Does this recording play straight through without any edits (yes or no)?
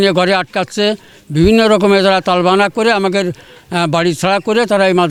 yes